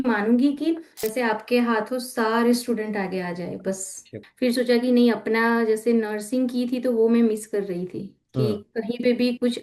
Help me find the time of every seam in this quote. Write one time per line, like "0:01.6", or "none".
0:00.9
0:04.1